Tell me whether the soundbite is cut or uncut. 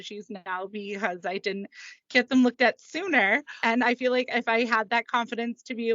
cut